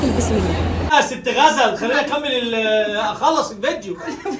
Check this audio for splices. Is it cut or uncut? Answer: cut